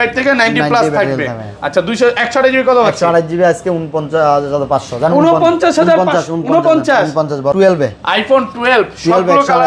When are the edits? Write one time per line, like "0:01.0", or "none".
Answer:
0:07.5